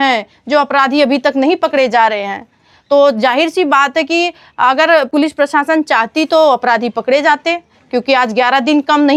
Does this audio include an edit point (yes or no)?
no